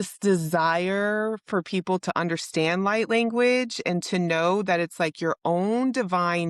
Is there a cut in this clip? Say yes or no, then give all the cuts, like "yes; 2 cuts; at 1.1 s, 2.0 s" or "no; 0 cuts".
no; 0 cuts